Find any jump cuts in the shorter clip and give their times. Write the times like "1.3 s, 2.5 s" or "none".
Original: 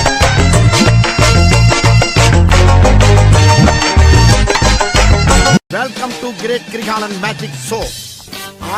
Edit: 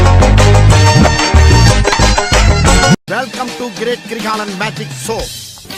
none